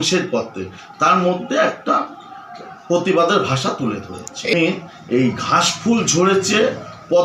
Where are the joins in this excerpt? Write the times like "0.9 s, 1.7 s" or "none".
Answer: 4.5 s